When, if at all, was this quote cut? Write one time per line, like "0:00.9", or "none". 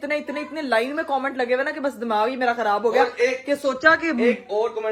none